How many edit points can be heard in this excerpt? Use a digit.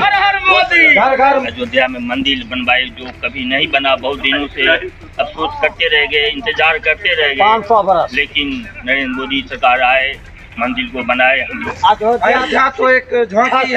2